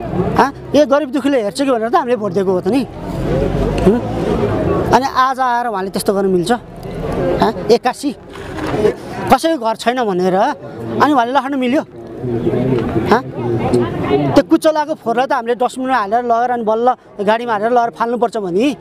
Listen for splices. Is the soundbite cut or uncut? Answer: cut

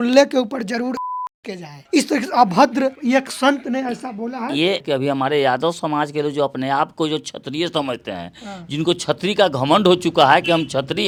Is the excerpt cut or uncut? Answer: uncut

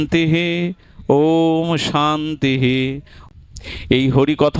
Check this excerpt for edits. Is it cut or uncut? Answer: cut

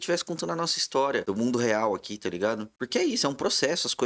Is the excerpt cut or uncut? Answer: cut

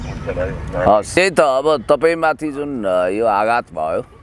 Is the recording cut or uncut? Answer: cut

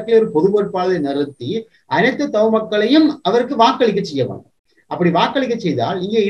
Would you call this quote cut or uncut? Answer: uncut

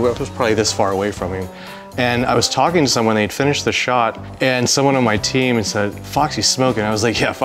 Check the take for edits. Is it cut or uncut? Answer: cut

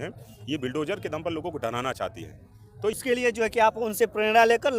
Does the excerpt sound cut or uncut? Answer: cut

